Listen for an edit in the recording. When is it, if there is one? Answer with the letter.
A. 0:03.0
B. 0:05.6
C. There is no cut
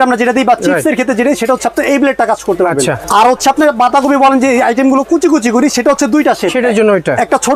A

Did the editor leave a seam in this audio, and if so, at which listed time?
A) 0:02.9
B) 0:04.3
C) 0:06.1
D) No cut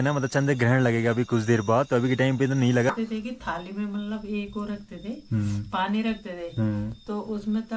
A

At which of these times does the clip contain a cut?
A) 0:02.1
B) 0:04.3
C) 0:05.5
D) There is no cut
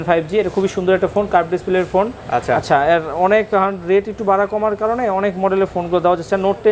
D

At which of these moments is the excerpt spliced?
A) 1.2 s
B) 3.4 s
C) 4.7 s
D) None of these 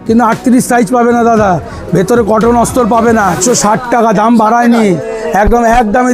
B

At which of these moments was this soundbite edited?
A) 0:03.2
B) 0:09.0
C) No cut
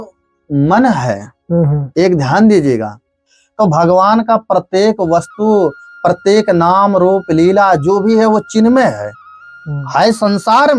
A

